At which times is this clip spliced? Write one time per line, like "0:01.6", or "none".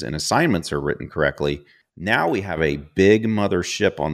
0:02.1